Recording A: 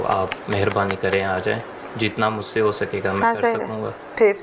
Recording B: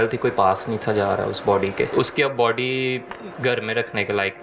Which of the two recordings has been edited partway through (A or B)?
B